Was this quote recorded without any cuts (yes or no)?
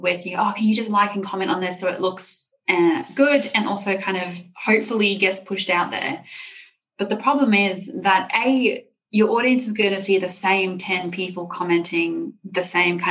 yes